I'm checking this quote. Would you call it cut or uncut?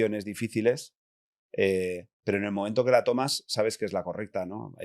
uncut